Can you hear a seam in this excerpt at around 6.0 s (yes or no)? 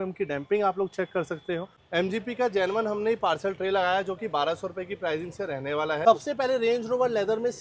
yes